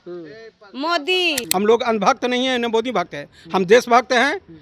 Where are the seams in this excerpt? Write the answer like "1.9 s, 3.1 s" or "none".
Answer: 1.4 s